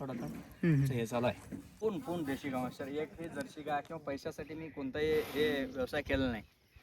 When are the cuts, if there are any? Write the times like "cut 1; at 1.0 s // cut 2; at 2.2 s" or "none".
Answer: cut 1; at 1.7 s